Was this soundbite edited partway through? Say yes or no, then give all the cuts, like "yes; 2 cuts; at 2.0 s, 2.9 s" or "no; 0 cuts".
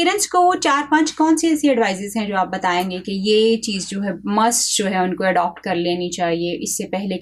no; 0 cuts